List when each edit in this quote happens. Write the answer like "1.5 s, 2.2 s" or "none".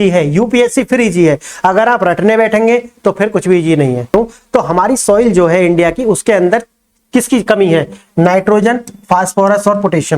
4.1 s